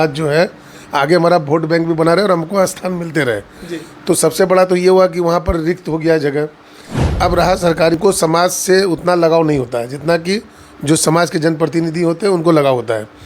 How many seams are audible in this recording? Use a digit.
1